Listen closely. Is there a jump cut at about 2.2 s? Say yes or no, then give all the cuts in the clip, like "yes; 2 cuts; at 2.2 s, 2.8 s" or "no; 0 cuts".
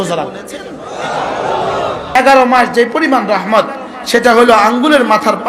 yes; 1 cut; at 2.2 s